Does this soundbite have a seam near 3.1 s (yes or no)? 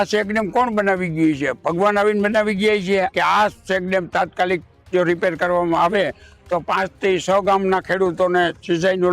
yes